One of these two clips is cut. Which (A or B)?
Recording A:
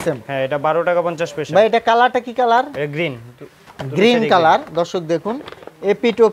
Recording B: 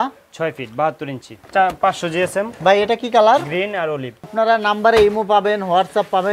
B